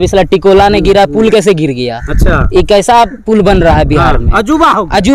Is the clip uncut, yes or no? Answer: yes